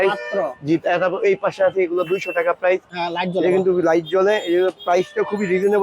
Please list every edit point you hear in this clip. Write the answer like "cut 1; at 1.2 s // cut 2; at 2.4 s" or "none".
cut 1; at 2.9 s